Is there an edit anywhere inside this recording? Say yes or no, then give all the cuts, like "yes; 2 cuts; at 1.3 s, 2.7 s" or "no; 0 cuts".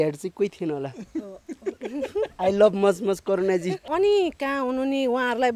yes; 1 cut; at 3.8 s